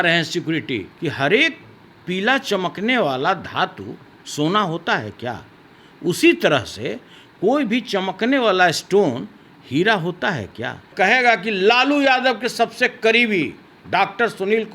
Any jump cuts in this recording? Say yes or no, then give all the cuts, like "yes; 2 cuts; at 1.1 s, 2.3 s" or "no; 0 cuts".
yes; 2 cuts; at 0.9 s, 10.9 s